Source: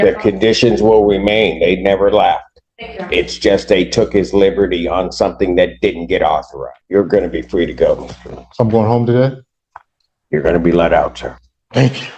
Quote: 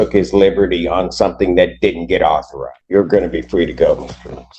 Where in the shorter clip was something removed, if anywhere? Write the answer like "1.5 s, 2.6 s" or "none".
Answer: none